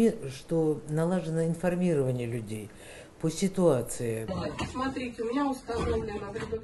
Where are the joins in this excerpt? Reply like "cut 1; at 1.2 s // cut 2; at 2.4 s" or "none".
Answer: cut 1; at 4.3 s